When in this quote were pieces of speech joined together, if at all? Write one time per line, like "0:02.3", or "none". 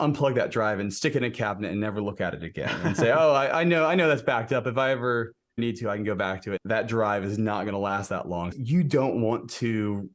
0:06.6
0:08.5